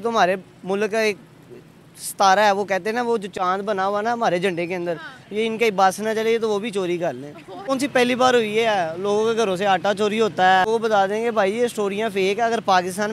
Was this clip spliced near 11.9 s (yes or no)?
no